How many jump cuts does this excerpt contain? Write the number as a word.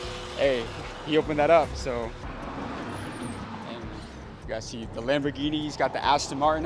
one